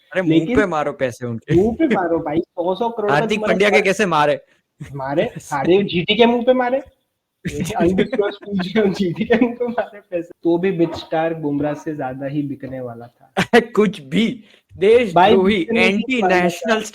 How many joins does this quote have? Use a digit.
1